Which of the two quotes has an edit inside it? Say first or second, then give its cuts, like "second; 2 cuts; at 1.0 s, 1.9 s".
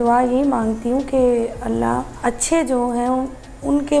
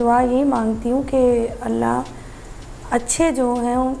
first; 1 cut; at 2.1 s